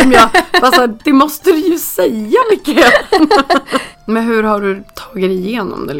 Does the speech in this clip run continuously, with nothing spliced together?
no; 1 cut; at 3.9 s

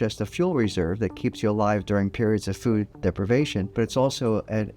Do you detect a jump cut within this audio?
yes; 1 cut; at 3.7 s

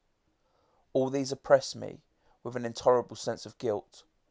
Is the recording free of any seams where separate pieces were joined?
yes; 0 cuts

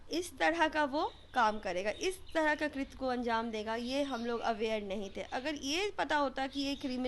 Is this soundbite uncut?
yes; 0 cuts

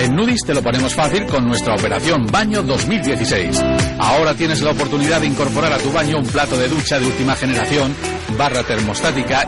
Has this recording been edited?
no; 0 cuts

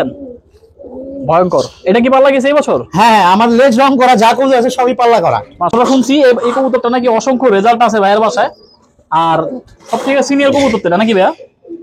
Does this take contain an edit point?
yes; 1 cut; at 5.7 s

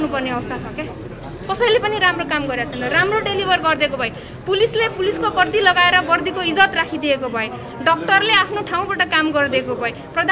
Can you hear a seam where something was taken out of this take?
no; 0 cuts

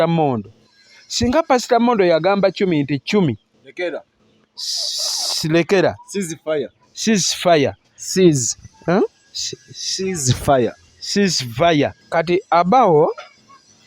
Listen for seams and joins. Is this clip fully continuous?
no; 1 cut; at 12.0 s

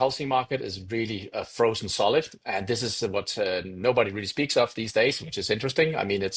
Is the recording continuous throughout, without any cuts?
yes; 0 cuts

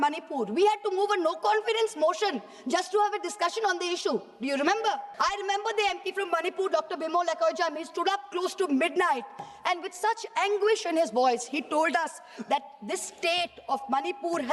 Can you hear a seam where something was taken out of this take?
yes; 1 cut; at 5.1 s

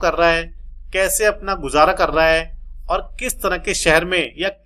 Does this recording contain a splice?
no; 0 cuts

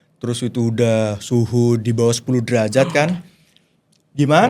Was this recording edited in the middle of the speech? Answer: no; 0 cuts

